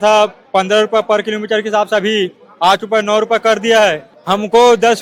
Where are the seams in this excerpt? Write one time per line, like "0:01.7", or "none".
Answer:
0:04.1